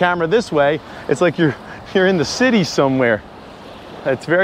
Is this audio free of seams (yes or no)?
yes